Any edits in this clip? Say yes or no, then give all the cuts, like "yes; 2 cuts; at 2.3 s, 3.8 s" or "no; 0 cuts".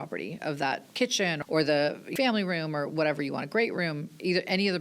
yes; 2 cuts; at 1.3 s, 2.1 s